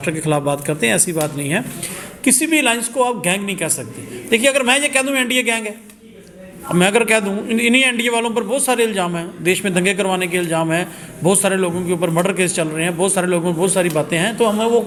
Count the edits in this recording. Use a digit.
0